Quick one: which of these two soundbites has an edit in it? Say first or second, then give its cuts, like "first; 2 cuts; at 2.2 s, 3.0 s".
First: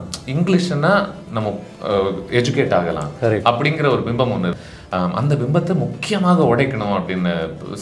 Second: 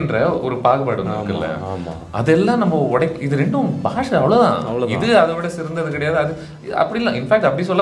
first; 1 cut; at 4.6 s